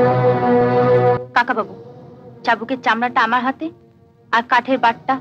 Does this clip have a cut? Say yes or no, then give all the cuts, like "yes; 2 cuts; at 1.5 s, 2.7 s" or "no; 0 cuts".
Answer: no; 0 cuts